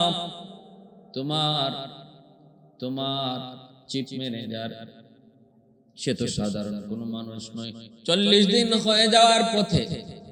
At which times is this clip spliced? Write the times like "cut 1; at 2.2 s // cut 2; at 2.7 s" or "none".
none